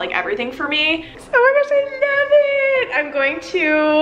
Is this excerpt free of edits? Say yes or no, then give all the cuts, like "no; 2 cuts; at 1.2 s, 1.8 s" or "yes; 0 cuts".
no; 1 cut; at 1.2 s